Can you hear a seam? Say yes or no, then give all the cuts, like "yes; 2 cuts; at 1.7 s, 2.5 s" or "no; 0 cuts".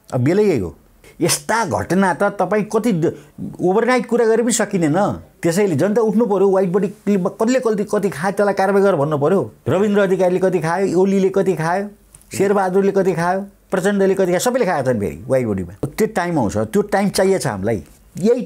yes; 4 cuts; at 1.0 s, 5.3 s, 9.6 s, 15.9 s